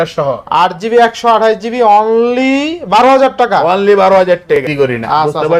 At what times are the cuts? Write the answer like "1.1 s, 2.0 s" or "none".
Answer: 4.7 s